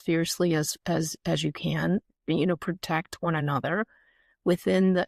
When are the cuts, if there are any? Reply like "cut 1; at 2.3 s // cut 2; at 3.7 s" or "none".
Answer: none